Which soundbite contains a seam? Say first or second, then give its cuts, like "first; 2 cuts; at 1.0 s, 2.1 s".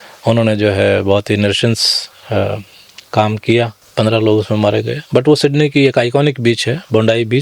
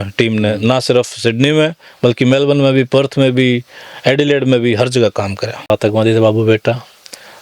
second; 1 cut; at 5.7 s